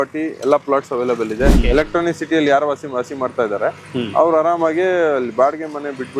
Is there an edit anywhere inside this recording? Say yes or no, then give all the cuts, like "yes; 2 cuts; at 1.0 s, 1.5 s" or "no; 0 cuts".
yes; 1 cut; at 1.6 s